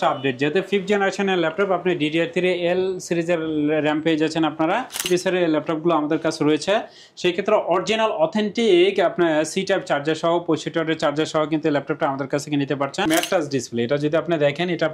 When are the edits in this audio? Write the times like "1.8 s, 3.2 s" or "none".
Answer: 5.0 s, 13.0 s